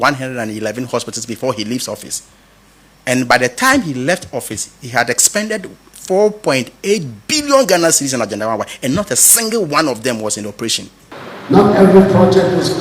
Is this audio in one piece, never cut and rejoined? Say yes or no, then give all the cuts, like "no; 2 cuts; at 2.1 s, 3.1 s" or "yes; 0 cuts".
yes; 0 cuts